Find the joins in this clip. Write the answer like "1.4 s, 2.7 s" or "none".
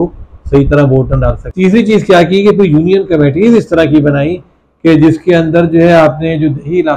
1.4 s

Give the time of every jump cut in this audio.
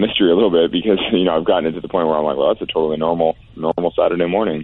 none

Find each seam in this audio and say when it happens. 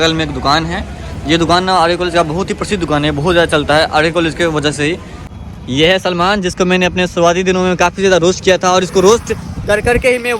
5.3 s

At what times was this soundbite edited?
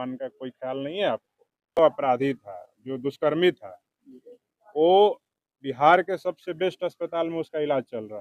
1.8 s

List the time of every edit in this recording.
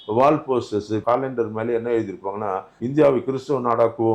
1.0 s, 2.7 s

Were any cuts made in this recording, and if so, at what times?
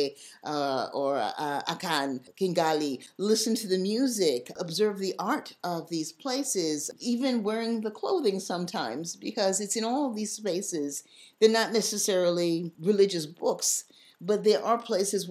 2.3 s, 3.1 s, 4.6 s, 6.9 s, 12.7 s

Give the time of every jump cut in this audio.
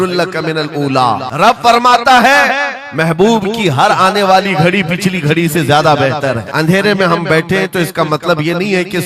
1.3 s, 6.5 s

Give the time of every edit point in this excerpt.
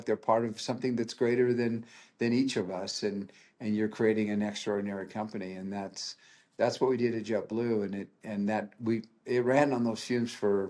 none

